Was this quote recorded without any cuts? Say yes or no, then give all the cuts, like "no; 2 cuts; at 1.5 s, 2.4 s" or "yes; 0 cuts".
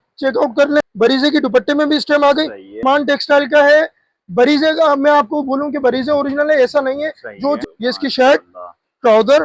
no; 3 cuts; at 0.9 s, 2.8 s, 7.6 s